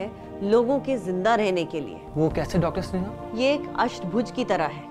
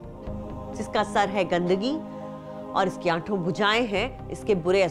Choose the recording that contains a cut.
first; 2 cuts; at 2.0 s, 3.2 s

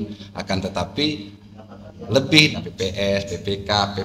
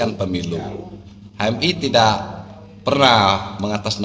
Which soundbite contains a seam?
first; 1 cut; at 2.5 s

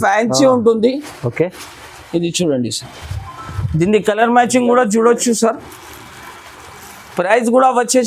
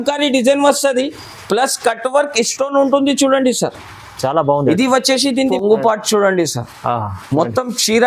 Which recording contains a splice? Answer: second; 1 cut; at 5.5 s

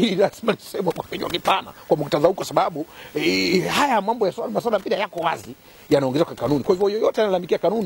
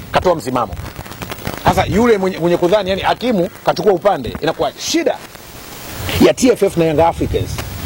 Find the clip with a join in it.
second; 1 cut; at 4.8 s

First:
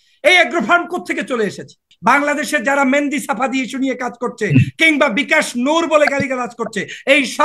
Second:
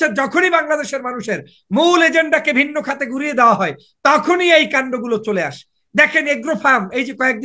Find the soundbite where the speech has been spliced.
first; 1 cut; at 1.9 s

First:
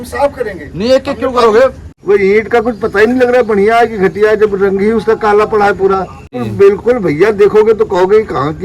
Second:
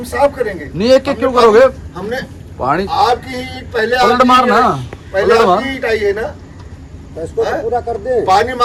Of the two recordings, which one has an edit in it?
first; 2 cuts; at 1.9 s, 6.4 s

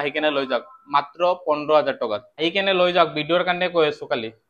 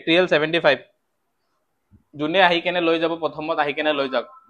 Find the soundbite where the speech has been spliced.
first; 1 cut; at 2.3 s

